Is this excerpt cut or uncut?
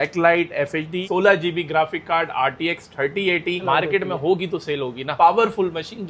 cut